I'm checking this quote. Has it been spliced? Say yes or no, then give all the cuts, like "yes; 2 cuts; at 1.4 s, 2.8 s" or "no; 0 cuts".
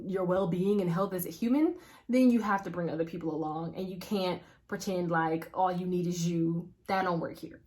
yes; 1 cut; at 6.7 s